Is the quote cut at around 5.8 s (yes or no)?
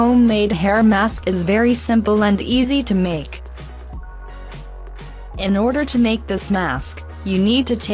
no